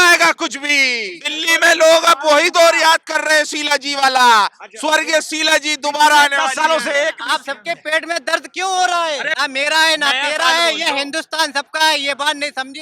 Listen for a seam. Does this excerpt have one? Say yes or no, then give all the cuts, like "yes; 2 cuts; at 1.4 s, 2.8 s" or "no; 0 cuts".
yes; 3 cuts; at 1.3 s, 7.2 s, 9.3 s